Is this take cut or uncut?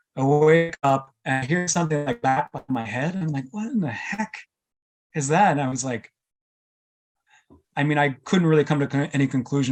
uncut